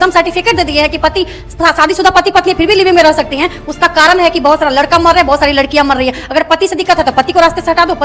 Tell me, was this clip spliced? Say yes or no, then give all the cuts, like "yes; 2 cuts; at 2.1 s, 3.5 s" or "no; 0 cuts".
no; 0 cuts